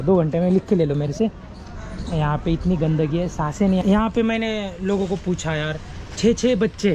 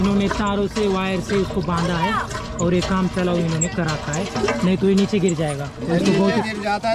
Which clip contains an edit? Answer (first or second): first